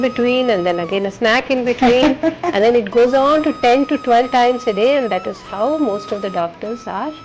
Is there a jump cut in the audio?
no; 0 cuts

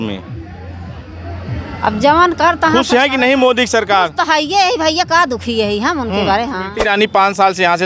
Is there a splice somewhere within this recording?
yes; 1 cut; at 6.7 s

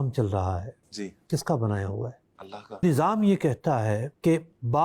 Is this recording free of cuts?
no; 1 cut; at 2.8 s

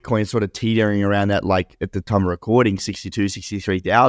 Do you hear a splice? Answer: no; 0 cuts

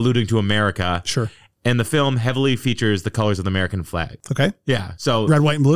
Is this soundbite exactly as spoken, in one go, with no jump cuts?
yes; 0 cuts

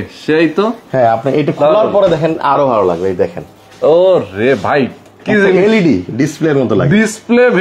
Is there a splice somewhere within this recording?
no; 0 cuts

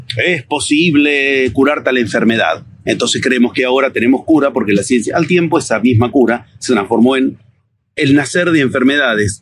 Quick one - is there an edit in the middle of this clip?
no; 0 cuts

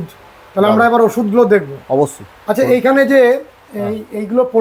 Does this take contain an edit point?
no; 0 cuts

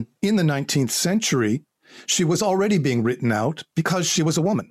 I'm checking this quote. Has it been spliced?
no; 0 cuts

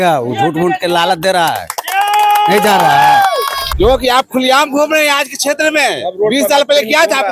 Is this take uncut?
no; 1 cut; at 3.6 s

